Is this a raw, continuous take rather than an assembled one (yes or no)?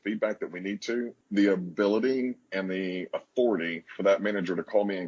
no